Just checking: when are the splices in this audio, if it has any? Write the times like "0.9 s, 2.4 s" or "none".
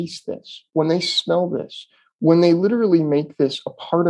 none